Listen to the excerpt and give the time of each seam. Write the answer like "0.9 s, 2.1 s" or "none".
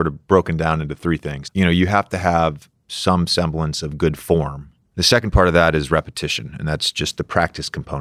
1.1 s